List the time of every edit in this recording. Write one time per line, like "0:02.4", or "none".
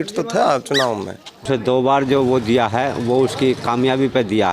0:01.5